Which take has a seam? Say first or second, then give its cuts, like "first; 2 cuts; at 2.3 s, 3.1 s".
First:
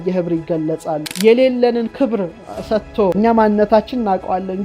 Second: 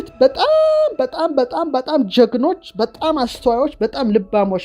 first; 2 cuts; at 1.0 s, 3.2 s